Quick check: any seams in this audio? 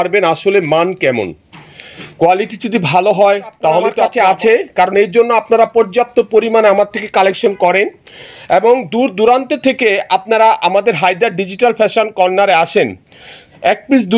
yes; 1 cut; at 4.0 s

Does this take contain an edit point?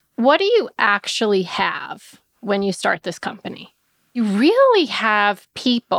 yes; 1 cut; at 4.1 s

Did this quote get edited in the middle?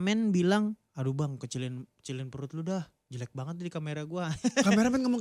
no; 0 cuts

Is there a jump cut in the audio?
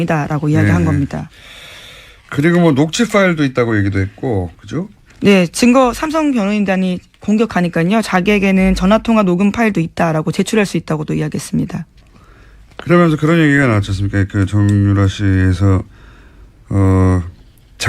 yes; 1 cut; at 11.3 s

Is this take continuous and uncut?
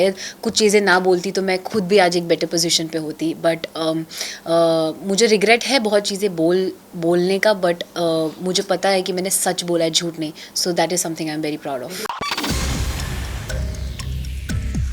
yes; 0 cuts

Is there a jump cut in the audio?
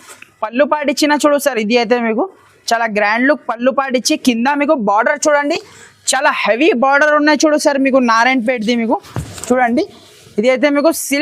no; 0 cuts

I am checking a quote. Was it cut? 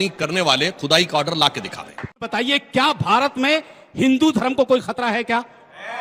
yes; 1 cut; at 2.2 s

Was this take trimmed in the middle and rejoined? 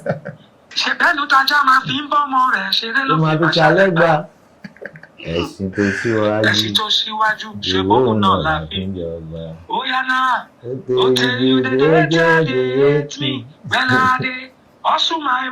no; 0 cuts

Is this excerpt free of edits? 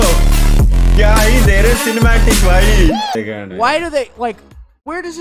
no; 1 cut; at 3.1 s

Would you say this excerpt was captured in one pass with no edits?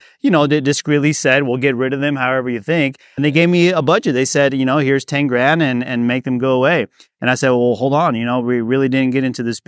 no; 1 cut; at 3.2 s

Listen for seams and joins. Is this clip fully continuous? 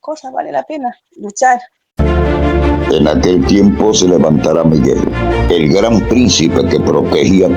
no; 1 cut; at 1.8 s

